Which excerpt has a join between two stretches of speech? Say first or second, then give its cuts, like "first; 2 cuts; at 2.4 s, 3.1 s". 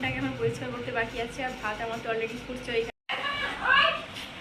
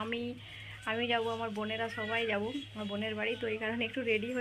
first; 1 cut; at 2.9 s